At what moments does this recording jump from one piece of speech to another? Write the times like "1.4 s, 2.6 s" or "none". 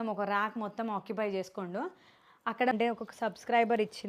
2.7 s